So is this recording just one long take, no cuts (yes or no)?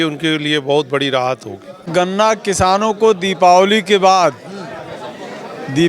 no